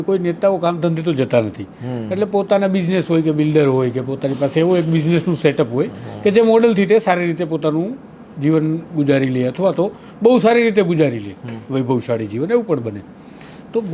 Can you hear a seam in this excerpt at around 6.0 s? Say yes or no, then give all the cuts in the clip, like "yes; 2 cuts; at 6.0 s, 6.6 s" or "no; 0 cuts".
no; 0 cuts